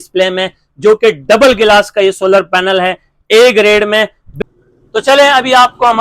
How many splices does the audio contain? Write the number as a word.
one